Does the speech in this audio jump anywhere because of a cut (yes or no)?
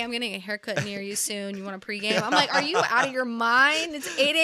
no